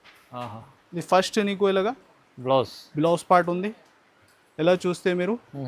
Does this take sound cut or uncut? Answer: uncut